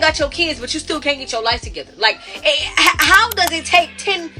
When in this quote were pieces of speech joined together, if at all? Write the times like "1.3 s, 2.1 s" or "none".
1.8 s